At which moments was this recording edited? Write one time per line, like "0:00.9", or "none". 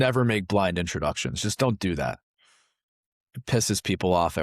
0:03.0